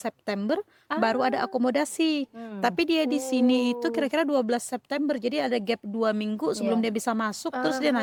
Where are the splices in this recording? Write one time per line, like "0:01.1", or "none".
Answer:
none